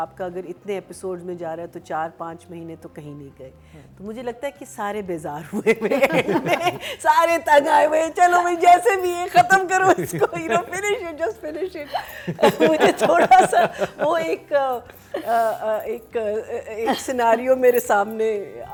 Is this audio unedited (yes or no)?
yes